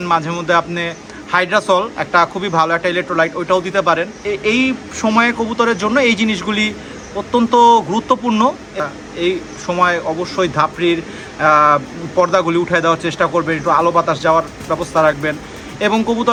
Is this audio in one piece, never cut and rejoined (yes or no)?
yes